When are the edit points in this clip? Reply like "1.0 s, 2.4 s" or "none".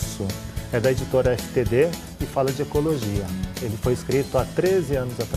4.3 s

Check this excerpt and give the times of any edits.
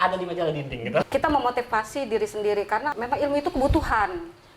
1.0 s, 2.9 s

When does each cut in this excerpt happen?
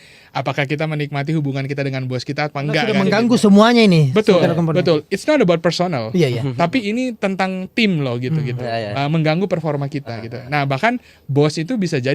3.0 s

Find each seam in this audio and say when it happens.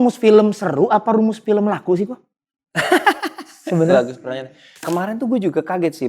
4.9 s

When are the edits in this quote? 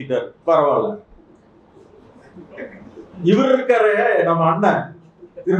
none

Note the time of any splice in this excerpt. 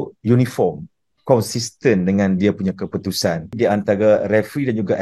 3.5 s

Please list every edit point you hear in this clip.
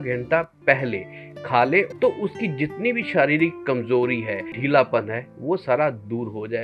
1.9 s, 4.6 s

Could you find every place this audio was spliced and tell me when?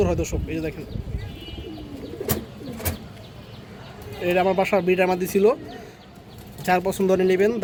none

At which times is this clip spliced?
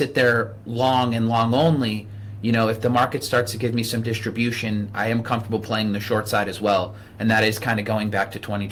none

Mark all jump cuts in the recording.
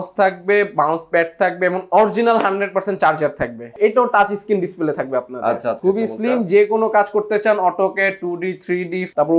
3.7 s, 5.8 s

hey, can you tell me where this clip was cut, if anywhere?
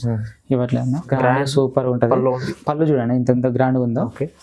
1.1 s

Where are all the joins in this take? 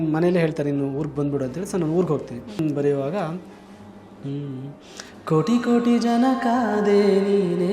2.6 s

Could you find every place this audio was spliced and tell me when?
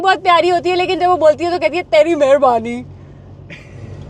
none

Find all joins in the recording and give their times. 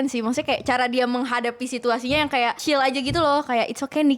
2.6 s

